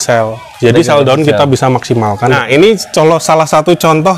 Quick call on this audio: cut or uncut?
cut